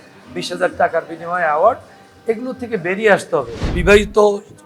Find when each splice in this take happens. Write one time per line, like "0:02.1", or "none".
0:03.7